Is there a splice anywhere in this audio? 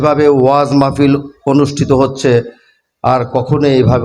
no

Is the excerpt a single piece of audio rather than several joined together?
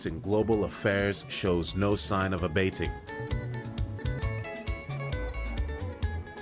no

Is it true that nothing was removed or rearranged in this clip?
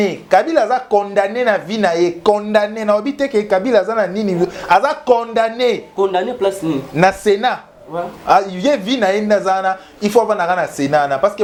yes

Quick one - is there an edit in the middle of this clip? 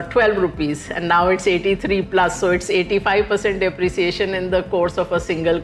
no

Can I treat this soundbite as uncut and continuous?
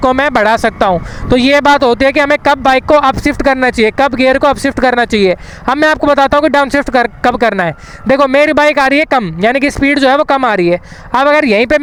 yes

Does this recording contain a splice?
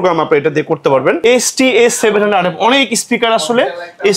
yes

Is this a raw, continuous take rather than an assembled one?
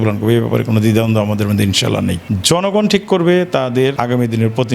no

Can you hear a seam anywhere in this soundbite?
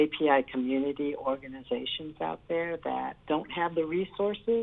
yes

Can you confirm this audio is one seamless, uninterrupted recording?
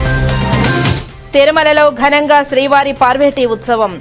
no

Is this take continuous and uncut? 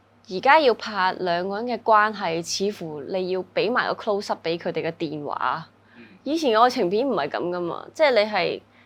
yes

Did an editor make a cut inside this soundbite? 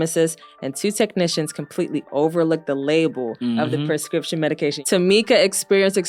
yes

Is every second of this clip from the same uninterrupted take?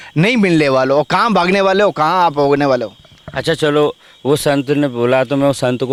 yes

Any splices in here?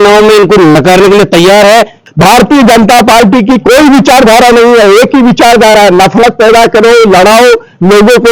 yes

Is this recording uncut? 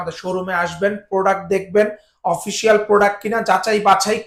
yes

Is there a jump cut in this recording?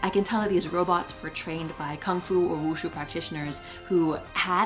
no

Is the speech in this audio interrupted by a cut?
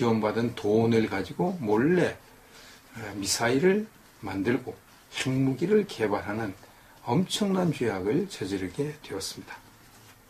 yes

